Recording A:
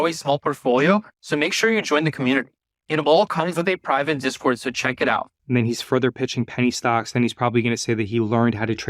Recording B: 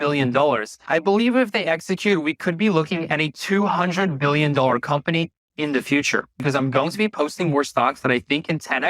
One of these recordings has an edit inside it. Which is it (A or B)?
B